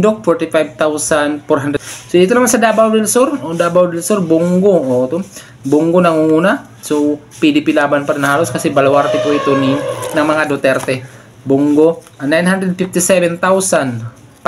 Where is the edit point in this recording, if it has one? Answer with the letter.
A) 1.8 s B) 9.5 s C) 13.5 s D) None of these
A